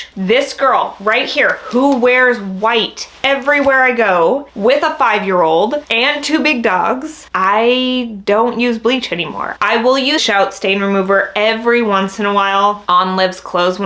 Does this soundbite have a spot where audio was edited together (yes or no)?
no